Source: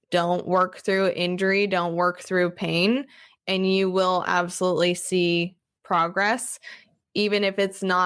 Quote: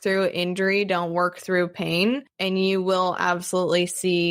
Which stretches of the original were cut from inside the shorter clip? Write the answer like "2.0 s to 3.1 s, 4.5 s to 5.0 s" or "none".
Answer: 3.1 s to 3.4 s